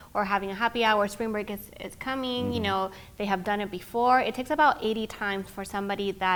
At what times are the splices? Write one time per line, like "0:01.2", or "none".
none